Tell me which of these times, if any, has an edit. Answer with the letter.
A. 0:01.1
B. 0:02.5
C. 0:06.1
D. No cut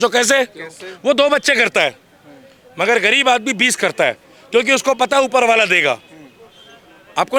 D